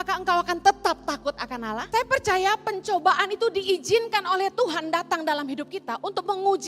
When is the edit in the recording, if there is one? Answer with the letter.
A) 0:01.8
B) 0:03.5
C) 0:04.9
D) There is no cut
A